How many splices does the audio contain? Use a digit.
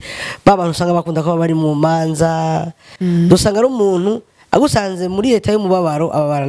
1